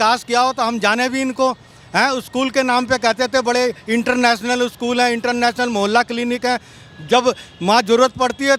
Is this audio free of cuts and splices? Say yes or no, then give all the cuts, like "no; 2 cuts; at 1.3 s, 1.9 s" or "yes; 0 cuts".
yes; 0 cuts